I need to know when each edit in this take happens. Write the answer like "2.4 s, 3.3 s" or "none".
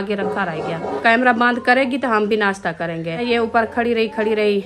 1.0 s, 3.2 s

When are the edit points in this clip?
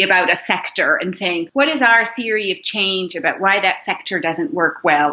1.5 s

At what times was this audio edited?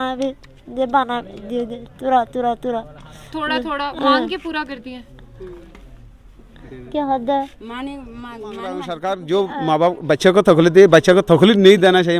8.9 s

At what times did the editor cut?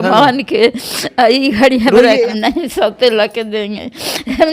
2.3 s

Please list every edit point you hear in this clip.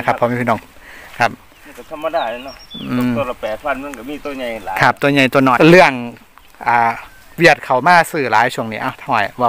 5.5 s

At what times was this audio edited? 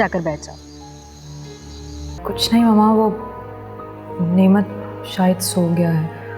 2.2 s

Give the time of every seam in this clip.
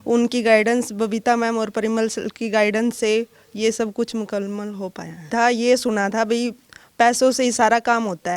5.3 s

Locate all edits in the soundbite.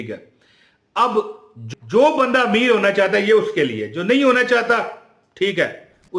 1.6 s

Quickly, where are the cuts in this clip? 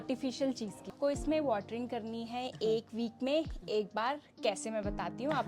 1.0 s

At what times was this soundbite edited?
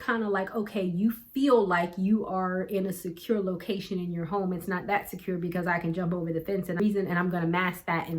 6.8 s

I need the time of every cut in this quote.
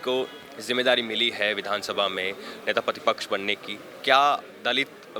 none

